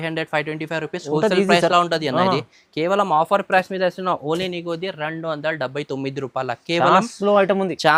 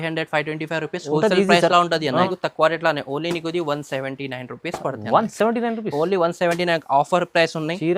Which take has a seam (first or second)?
second